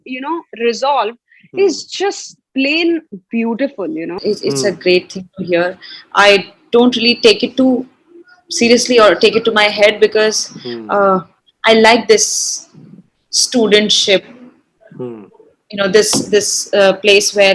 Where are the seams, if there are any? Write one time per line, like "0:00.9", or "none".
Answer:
0:04.1